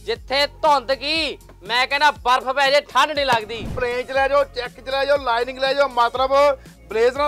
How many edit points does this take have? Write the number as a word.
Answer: one